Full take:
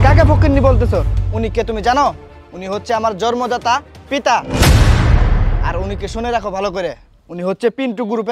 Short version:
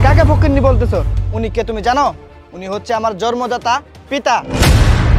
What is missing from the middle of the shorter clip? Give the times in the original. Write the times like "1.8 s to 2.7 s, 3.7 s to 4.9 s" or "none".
none